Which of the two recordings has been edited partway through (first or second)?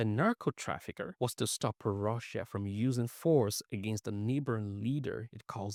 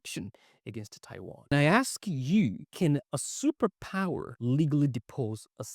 second